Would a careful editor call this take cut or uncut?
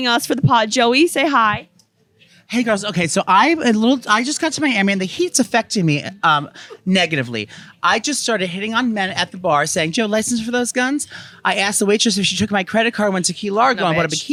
uncut